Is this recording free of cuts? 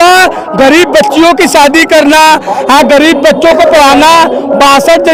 yes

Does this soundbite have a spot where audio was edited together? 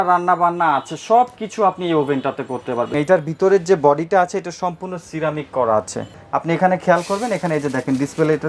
yes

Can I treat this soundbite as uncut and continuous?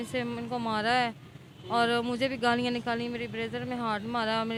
yes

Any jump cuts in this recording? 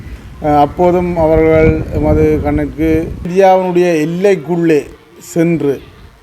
yes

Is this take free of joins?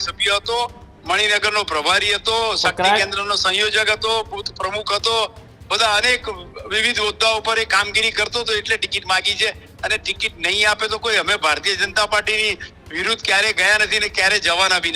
yes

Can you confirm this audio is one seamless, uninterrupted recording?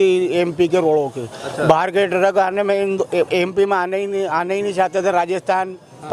yes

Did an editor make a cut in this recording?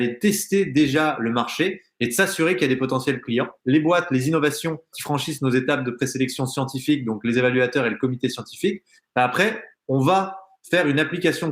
yes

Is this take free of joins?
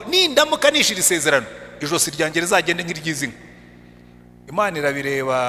yes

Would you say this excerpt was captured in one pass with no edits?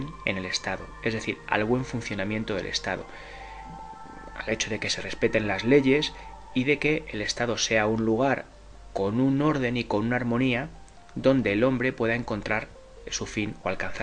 no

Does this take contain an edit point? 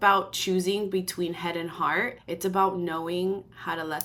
no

